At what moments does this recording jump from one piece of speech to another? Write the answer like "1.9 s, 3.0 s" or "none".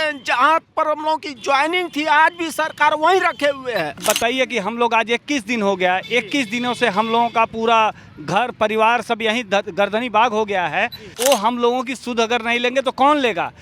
4.0 s, 11.1 s